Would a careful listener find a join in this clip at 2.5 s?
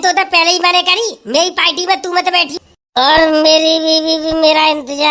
yes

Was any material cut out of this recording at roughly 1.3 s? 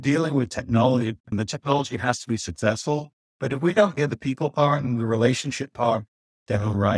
yes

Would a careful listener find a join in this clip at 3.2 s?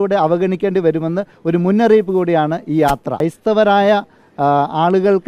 yes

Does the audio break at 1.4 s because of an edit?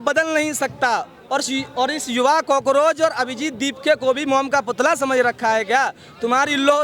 no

